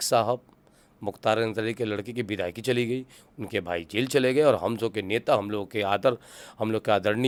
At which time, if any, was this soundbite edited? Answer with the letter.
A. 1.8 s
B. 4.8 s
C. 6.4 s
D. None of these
D